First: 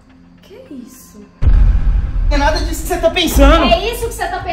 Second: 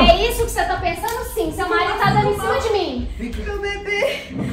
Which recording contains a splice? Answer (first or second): first